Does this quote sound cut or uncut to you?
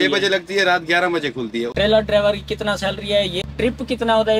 cut